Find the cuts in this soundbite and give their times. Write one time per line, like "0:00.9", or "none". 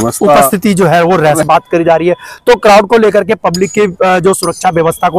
0:01.4